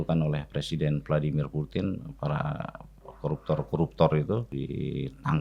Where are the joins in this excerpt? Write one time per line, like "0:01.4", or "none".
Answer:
0:04.5